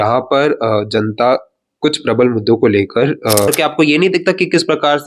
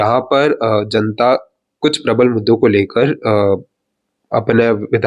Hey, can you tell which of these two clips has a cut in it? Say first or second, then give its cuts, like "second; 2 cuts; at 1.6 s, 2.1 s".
first; 1 cut; at 3.5 s